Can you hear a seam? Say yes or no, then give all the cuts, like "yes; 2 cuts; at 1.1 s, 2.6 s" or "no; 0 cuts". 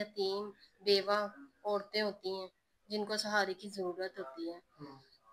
no; 0 cuts